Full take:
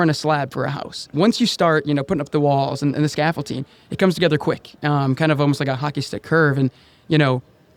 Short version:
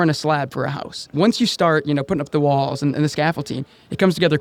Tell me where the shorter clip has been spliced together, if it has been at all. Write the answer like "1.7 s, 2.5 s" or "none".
none